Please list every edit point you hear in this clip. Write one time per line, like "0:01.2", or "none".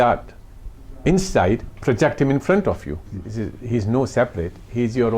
0:03.2